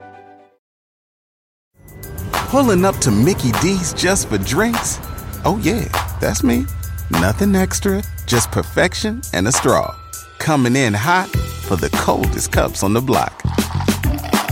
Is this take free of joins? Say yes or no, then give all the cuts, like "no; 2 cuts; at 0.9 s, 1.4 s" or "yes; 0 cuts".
yes; 0 cuts